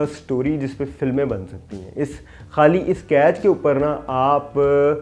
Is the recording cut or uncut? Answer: uncut